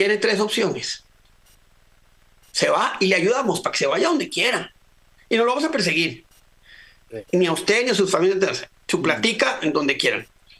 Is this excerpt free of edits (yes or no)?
yes